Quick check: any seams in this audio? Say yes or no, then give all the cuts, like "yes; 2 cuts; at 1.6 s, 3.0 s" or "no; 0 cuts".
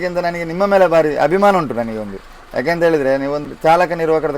yes; 1 cut; at 3.5 s